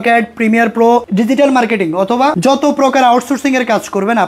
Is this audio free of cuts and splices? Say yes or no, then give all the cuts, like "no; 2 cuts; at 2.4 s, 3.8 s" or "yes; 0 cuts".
no; 2 cuts; at 1.1 s, 2.4 s